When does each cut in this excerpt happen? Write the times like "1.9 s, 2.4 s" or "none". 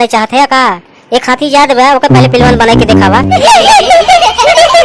3.3 s